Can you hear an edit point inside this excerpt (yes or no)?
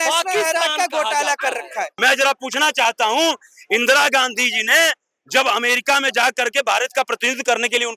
yes